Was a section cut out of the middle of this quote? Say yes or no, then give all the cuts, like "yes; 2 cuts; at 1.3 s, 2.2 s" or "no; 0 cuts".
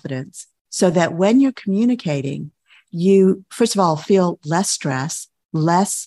no; 0 cuts